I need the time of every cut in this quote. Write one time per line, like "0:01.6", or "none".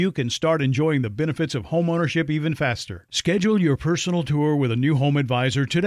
none